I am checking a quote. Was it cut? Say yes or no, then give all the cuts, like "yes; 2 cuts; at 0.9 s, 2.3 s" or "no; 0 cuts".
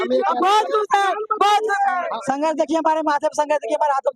yes; 1 cut; at 2.2 s